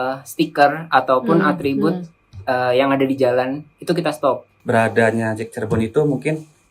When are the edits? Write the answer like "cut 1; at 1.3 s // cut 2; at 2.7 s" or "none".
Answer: cut 1; at 4.5 s